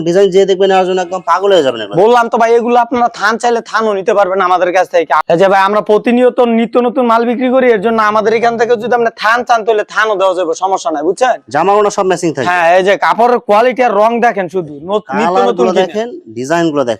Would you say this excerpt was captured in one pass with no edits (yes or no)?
yes